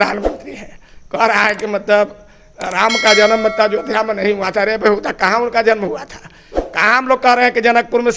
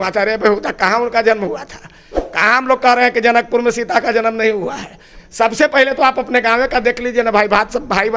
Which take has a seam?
second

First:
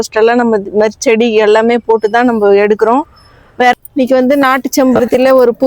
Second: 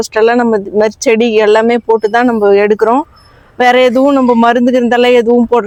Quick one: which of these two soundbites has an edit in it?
first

